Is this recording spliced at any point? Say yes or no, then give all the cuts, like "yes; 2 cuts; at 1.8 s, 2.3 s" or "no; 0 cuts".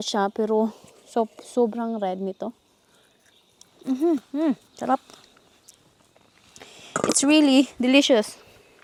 no; 0 cuts